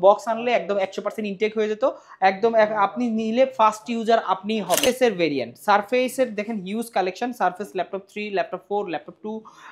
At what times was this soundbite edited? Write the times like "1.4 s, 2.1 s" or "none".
4.9 s